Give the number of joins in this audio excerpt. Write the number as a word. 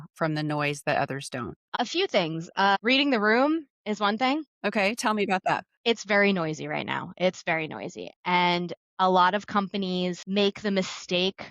two